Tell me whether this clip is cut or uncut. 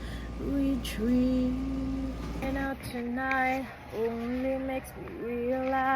cut